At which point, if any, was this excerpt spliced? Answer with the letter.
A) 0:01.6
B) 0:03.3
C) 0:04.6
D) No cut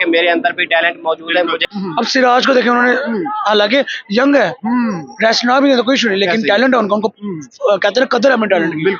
A